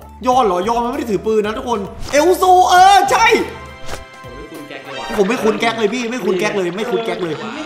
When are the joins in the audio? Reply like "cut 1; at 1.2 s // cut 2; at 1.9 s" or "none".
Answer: cut 1; at 3.9 s